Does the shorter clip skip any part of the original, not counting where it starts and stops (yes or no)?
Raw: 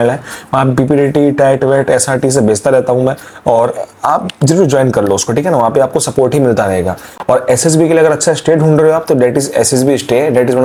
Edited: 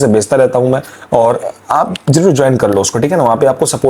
no